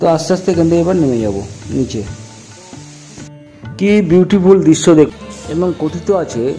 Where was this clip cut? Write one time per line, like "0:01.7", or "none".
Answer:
0:05.1

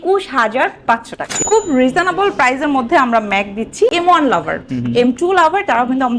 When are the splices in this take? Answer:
0:01.2
0:03.9

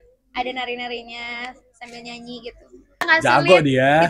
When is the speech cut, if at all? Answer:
0:03.1

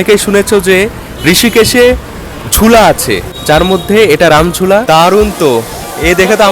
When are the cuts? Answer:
0:04.8

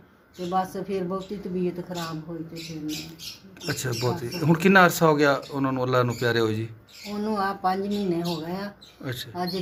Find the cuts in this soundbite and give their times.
none

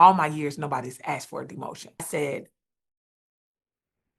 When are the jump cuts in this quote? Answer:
0:02.1

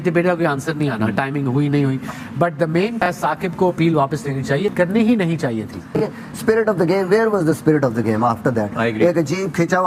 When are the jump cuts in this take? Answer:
0:05.8

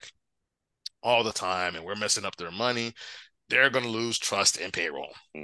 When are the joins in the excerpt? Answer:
none

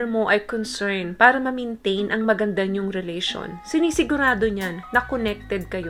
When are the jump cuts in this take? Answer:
none

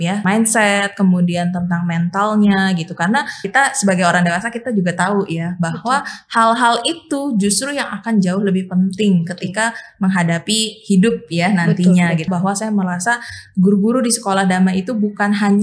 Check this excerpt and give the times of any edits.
0:03.4
0:12.3

